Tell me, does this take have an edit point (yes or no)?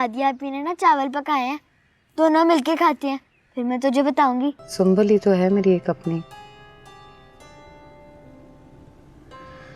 yes